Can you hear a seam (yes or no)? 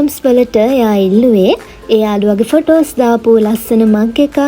no